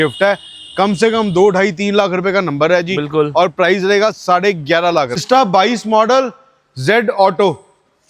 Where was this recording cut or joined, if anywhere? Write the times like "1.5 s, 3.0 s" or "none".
5.2 s